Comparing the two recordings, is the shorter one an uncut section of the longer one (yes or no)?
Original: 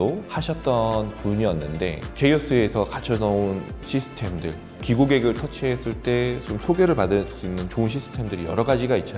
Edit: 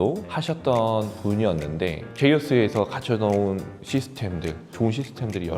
no